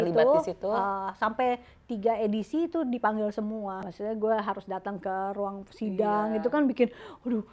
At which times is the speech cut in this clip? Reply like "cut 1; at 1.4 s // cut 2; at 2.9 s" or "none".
cut 1; at 3.8 s